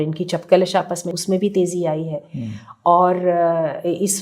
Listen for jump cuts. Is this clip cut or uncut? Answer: cut